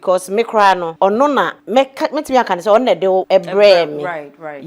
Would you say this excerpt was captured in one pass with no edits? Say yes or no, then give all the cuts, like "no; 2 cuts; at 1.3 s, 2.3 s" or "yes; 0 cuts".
no; 3 cuts; at 0.9 s, 1.6 s, 3.2 s